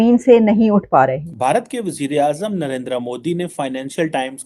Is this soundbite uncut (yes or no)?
no